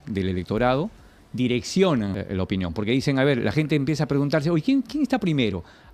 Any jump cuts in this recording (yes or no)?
yes